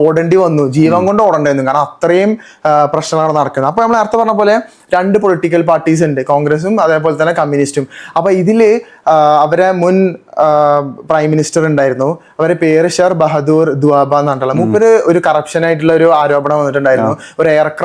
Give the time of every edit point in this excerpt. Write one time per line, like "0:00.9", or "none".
none